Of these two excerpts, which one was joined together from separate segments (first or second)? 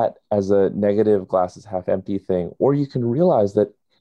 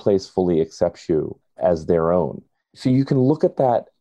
second